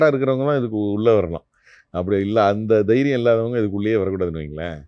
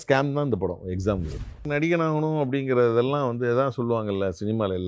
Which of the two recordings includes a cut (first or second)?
second